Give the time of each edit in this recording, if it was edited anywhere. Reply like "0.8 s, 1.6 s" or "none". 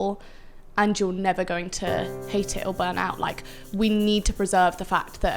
2.2 s